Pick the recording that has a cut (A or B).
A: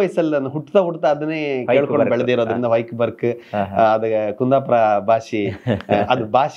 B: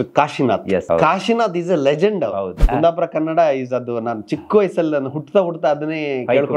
B